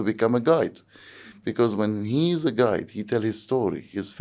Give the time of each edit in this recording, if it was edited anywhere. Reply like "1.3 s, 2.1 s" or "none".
none